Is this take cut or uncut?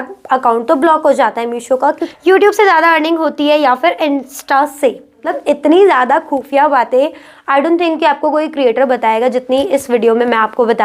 cut